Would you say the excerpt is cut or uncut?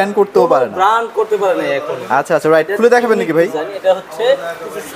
uncut